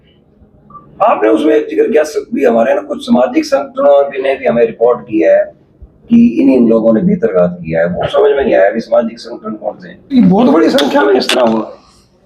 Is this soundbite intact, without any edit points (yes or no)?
no